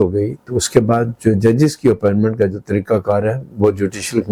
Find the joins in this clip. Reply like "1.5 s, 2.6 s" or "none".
none